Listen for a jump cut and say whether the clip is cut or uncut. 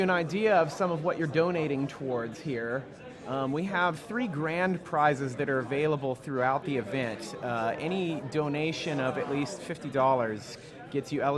cut